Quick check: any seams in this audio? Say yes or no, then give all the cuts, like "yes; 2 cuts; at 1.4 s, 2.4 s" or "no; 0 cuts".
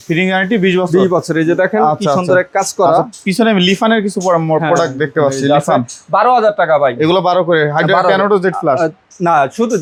no; 0 cuts